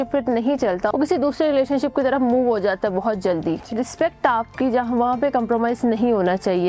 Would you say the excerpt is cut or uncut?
cut